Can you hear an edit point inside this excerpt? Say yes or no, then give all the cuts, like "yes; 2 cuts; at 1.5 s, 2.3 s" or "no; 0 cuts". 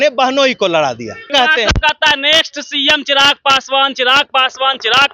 yes; 1 cut; at 1.3 s